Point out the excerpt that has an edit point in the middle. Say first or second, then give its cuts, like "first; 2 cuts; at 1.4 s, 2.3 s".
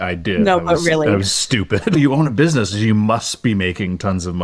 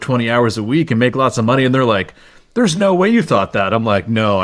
first; 1 cut; at 2.0 s